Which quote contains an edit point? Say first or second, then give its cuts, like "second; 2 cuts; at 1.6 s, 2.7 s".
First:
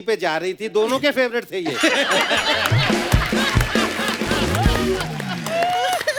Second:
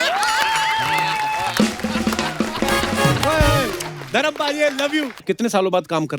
second; 1 cut; at 5.2 s